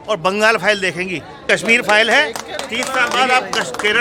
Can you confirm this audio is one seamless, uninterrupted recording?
no; 1 cut; at 1.4 s

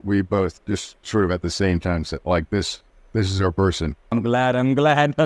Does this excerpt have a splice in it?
no; 0 cuts

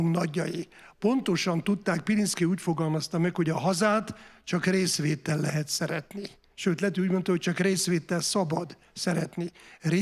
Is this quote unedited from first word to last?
yes; 0 cuts

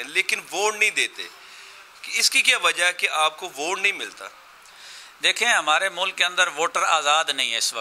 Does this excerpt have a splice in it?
no; 0 cuts

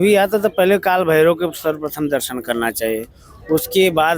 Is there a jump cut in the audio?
no; 0 cuts

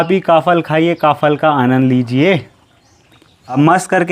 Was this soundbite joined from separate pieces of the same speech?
no; 0 cuts

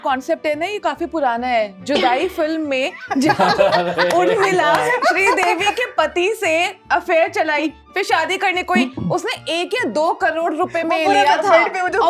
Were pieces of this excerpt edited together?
no; 0 cuts

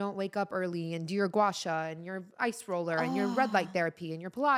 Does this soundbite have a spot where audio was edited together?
no; 0 cuts

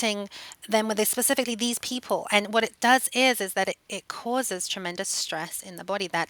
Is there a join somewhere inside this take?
no; 0 cuts

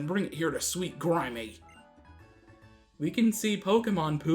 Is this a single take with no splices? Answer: no; 1 cut; at 2.5 s

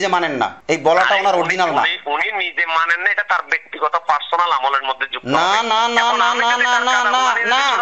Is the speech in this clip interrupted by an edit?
no; 0 cuts

